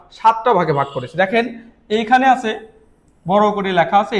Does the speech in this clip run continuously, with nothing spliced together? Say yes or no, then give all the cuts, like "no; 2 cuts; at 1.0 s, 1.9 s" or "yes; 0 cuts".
yes; 0 cuts